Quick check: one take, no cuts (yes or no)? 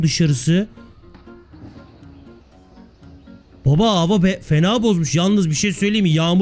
yes